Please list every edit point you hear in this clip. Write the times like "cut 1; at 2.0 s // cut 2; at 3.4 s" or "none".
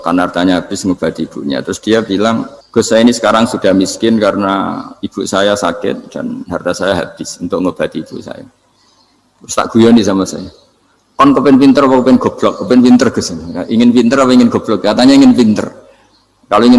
cut 1; at 2.6 s

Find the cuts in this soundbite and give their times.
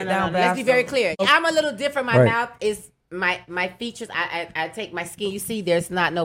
cut 1; at 1.3 s

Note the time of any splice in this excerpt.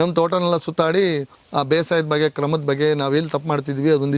cut 1; at 1.3 s

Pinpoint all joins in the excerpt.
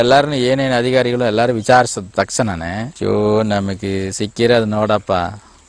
none

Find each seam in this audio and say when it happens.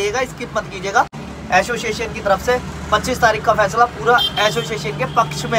cut 1; at 1.3 s

